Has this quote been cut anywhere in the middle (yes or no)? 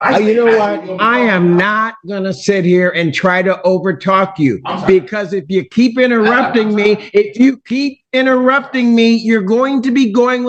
no